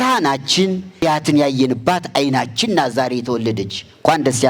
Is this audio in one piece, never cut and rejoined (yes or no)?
no